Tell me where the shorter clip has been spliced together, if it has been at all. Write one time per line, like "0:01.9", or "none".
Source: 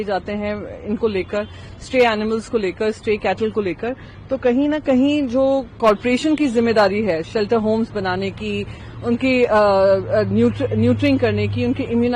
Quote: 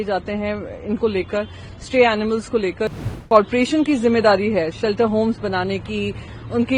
0:03.1

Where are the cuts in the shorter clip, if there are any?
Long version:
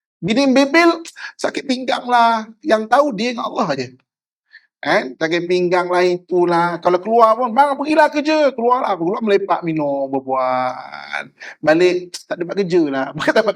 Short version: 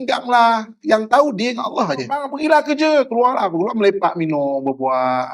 0:02.3

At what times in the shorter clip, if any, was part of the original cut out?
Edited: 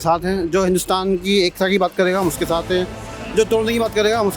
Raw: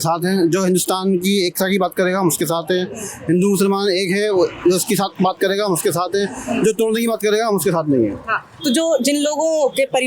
0:03.1

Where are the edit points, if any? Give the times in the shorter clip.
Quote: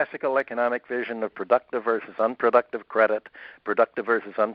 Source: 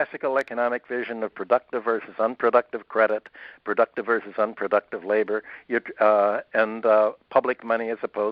none

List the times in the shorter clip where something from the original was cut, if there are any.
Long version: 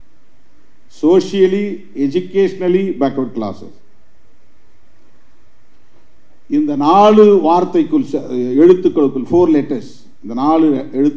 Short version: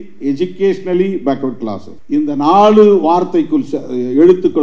0:01.9

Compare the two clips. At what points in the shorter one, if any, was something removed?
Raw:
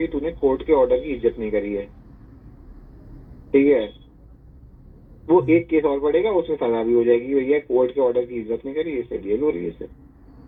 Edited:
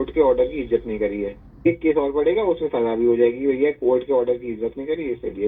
0:01.7

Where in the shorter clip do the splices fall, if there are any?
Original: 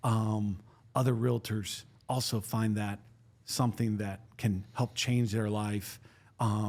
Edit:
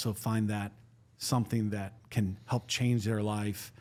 none

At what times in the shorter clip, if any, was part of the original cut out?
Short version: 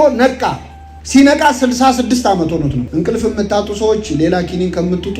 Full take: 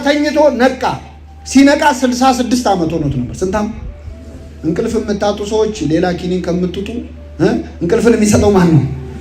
0:02.9

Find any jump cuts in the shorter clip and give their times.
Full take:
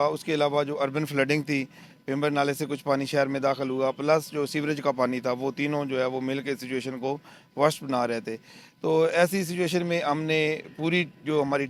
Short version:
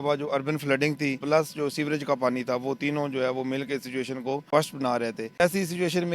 0:01.2
0:04.4
0:05.4

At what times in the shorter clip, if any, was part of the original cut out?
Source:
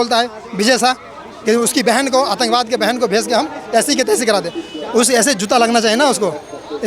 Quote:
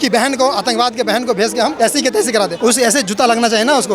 0:01.7
0:02.5

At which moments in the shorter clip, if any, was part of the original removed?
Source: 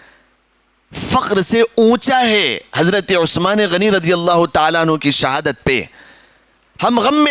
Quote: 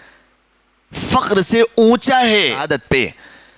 0:02.7

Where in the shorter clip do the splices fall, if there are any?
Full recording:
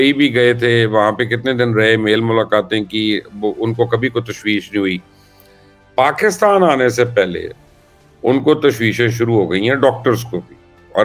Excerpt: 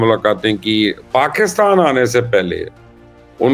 0:01.0

